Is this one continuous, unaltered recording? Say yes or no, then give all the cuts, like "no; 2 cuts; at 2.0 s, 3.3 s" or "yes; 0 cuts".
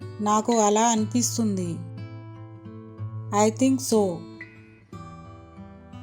yes; 0 cuts